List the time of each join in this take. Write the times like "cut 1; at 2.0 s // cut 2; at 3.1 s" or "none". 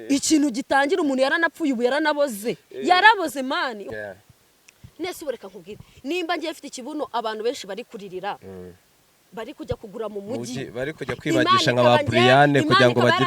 cut 1; at 3.8 s